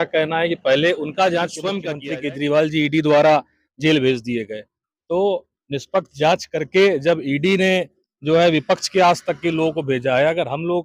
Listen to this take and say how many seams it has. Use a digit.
1